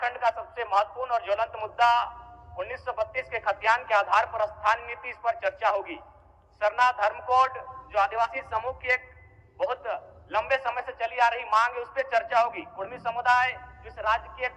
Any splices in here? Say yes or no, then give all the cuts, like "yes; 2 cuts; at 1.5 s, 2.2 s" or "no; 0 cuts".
no; 0 cuts